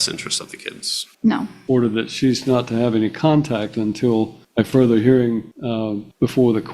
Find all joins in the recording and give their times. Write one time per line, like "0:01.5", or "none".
0:01.5
0:04.4
0:05.8